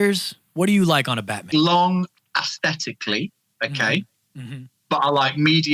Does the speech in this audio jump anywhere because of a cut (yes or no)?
yes